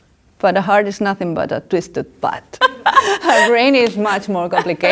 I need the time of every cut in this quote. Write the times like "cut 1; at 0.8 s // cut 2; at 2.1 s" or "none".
cut 1; at 2.6 s